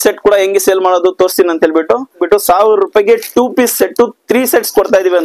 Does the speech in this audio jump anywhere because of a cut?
yes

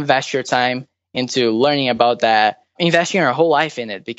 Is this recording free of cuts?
no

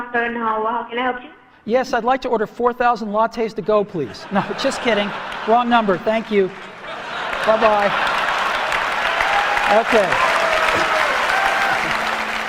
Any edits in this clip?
no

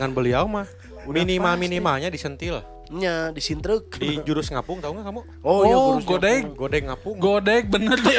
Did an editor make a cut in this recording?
no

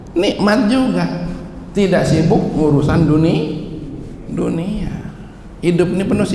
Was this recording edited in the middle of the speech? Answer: no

